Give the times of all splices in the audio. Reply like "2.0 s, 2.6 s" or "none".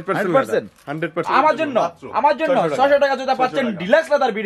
1.2 s